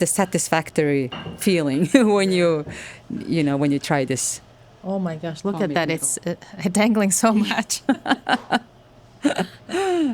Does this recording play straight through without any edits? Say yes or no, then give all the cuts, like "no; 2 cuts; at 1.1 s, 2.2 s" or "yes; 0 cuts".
yes; 0 cuts